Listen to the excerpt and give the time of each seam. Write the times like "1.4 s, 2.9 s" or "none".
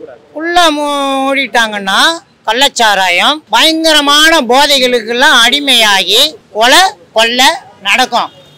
2.3 s, 6.4 s

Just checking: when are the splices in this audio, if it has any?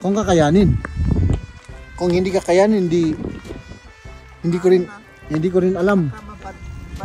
none

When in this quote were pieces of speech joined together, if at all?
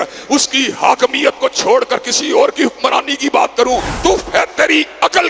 3.9 s

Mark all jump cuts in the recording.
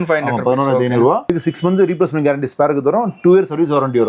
1.3 s

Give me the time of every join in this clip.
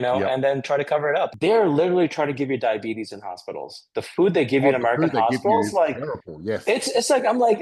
1.3 s

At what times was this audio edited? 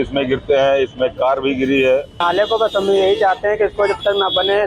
2.2 s

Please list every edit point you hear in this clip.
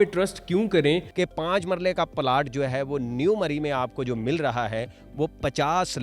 1.1 s

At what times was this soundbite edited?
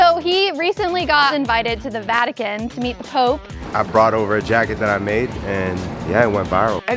1.3 s, 3.7 s

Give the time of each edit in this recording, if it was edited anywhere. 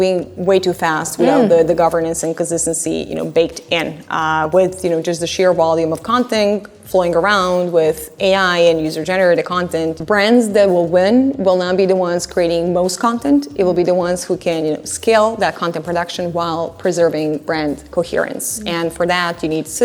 10.0 s

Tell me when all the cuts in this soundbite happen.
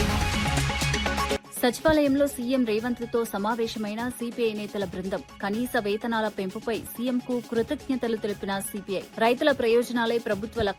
1.4 s

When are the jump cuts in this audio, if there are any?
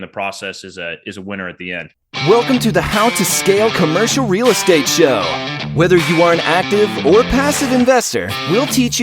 2.0 s

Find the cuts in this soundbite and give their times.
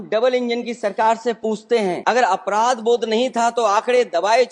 2.0 s

